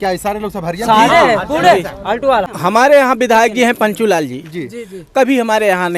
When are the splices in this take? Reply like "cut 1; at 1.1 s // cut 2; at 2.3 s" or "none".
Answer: cut 1; at 2.5 s